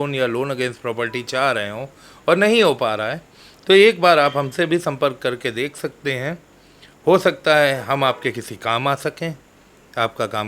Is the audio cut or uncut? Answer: uncut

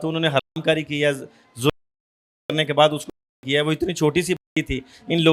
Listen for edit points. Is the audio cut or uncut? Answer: uncut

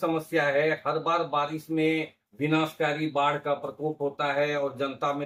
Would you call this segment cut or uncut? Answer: uncut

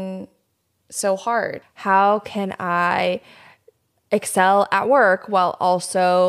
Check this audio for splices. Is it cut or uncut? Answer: cut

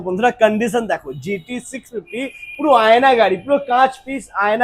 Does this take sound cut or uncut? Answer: uncut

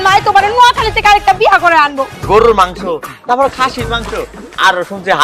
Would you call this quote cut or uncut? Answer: cut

